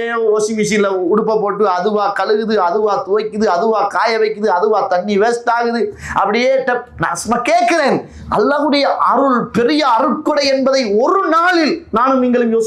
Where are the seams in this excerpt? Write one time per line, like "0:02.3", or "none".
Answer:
none